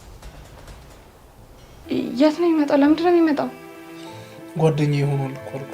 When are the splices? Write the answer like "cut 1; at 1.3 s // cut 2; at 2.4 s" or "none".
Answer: cut 1; at 1.7 s